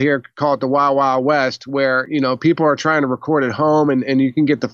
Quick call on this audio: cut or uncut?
cut